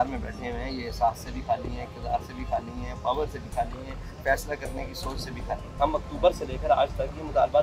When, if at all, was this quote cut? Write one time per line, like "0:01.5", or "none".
0:05.7

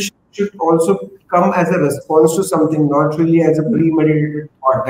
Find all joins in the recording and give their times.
none

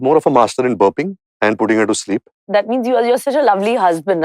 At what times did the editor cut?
0:02.4

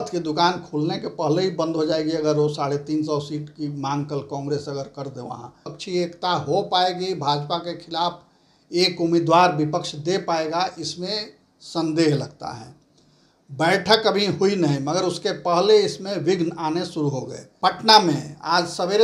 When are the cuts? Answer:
0:05.7
0:17.4

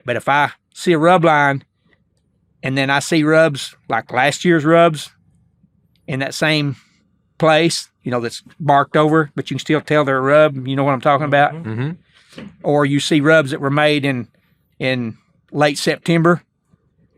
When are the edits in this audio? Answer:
none

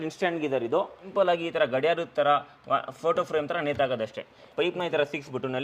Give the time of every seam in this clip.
0:01.0
0:04.5

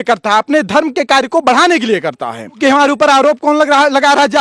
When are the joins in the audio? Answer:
0:02.6

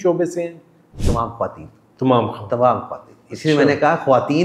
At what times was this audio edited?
none

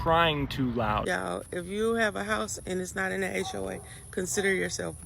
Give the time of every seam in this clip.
0:01.0

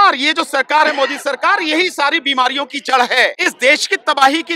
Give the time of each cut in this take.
0:03.4

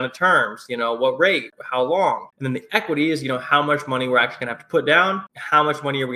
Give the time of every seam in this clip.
0:02.3
0:05.2

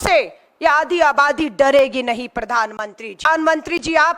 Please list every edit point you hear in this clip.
0:03.3

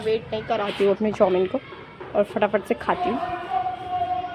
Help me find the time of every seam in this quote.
none

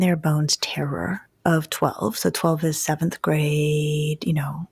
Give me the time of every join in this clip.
none

